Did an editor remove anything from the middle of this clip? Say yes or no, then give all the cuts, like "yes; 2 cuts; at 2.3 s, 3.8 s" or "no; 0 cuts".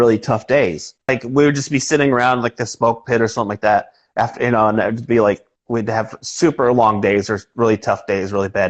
yes; 1 cut; at 1.1 s